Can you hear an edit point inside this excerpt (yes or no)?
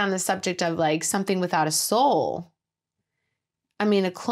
no